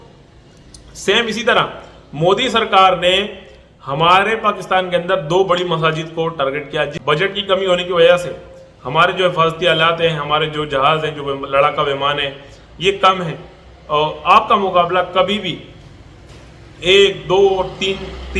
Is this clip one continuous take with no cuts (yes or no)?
no